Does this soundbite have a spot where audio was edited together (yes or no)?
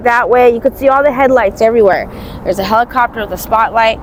no